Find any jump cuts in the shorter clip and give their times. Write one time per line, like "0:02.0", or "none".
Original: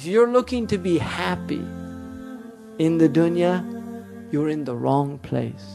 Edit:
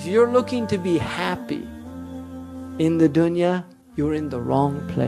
0:03.8